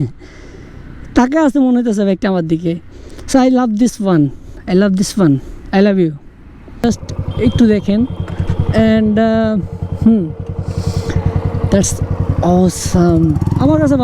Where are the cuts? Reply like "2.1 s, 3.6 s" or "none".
6.8 s